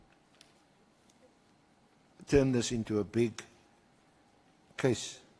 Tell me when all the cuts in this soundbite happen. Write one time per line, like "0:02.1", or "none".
none